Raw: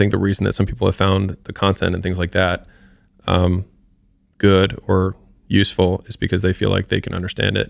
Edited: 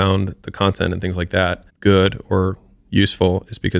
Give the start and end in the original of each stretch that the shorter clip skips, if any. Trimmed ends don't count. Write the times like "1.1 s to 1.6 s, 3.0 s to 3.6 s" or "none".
2.7 s to 4.2 s